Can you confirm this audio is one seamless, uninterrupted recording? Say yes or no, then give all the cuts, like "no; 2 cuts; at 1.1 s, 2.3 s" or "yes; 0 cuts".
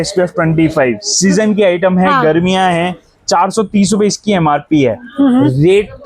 yes; 0 cuts